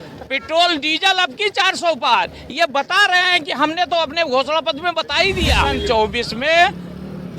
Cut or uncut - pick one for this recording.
cut